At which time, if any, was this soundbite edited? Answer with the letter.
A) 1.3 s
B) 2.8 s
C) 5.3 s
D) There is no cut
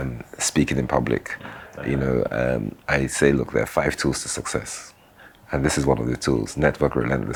D